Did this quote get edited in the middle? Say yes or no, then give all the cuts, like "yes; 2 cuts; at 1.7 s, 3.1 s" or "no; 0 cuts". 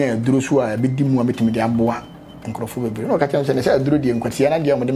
no; 0 cuts